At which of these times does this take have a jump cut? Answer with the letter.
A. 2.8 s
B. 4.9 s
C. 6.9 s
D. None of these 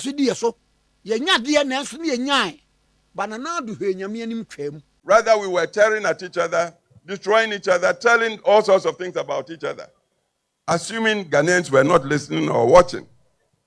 B